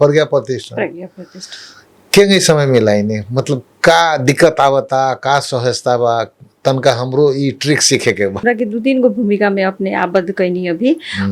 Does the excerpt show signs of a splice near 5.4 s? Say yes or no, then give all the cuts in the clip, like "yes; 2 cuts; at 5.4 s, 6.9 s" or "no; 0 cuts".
no; 1 cut; at 8.4 s